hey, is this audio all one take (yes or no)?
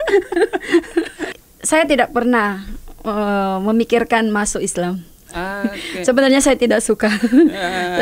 no